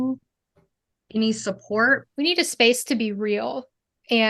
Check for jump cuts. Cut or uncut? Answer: cut